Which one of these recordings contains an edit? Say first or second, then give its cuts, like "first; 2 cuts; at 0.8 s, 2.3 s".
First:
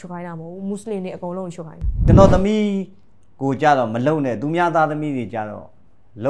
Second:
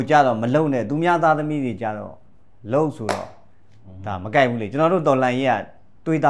first; 1 cut; at 2.0 s